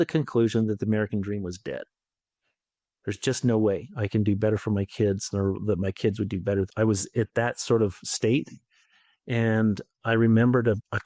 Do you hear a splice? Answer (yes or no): yes